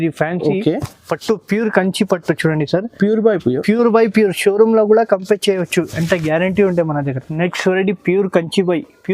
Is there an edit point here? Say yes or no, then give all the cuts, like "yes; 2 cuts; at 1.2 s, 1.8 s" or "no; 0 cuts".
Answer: yes; 1 cut; at 7.2 s